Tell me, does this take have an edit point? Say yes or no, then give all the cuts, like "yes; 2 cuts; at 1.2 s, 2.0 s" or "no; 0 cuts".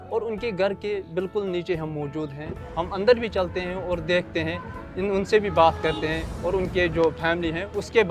yes; 1 cut; at 2.6 s